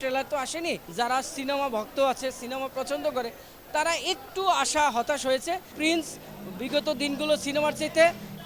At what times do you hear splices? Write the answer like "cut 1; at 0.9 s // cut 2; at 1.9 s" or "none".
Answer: cut 1; at 0.9 s // cut 2; at 5.7 s